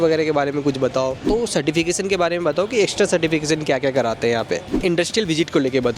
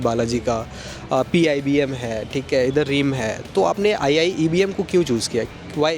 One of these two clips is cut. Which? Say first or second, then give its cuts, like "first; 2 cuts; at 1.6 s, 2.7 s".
first; 2 cuts; at 1.2 s, 4.8 s